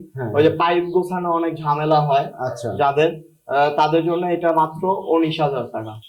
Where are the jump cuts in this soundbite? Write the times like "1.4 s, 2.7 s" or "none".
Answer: none